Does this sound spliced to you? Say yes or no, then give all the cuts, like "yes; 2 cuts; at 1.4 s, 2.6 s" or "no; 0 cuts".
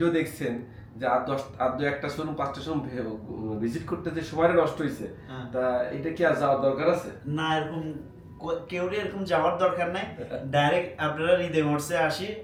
no; 0 cuts